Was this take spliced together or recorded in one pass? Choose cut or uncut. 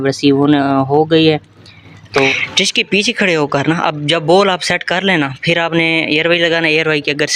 cut